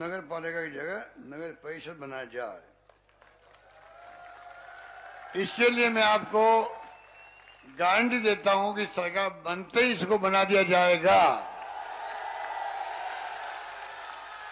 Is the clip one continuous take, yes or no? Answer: yes